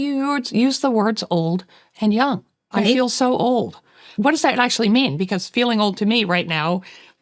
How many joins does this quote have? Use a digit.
2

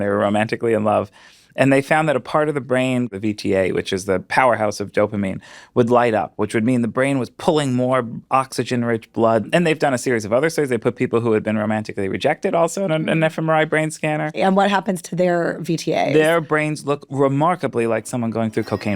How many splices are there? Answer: 3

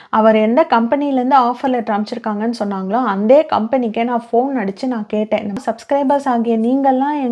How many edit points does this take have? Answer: 1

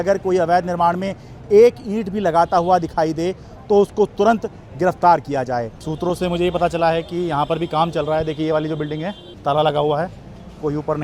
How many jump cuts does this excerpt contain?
2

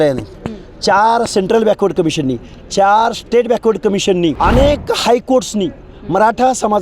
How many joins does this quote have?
1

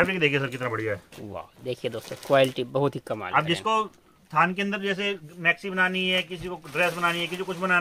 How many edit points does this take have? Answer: 0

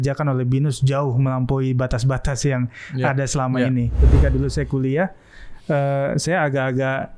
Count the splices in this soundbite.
1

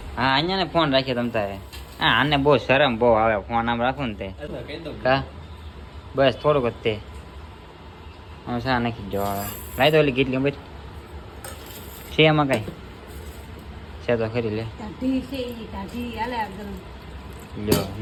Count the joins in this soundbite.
0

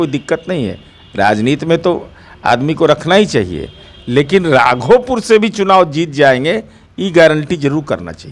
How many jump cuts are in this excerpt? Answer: 0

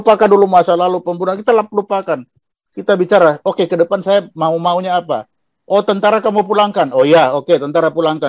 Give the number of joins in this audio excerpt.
0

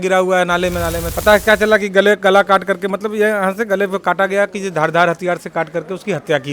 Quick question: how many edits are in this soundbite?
1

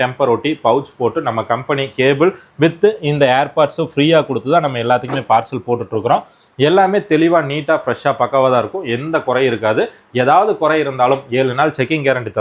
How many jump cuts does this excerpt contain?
0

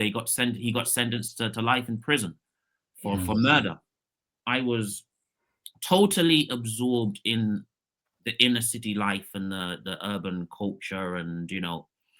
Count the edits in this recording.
1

